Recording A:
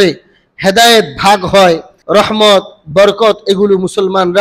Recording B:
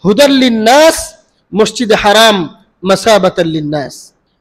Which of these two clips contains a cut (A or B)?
A